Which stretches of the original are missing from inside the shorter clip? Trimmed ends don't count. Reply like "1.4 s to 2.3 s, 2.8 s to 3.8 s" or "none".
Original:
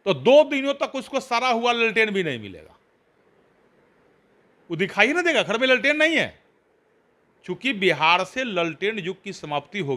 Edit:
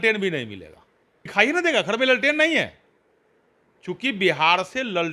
3.2 s to 4.9 s